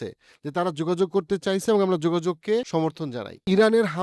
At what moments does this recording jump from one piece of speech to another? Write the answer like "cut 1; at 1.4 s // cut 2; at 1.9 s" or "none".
cut 1; at 3.1 s